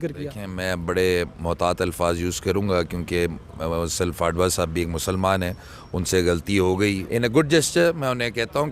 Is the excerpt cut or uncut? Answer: cut